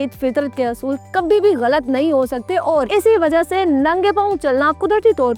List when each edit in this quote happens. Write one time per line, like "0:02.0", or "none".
0:02.8